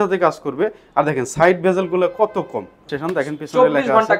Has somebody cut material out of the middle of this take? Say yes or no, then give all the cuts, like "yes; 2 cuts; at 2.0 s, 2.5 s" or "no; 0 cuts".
yes; 1 cut; at 2.9 s